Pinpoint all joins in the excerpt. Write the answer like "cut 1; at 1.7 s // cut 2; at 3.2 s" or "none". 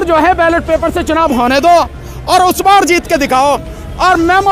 none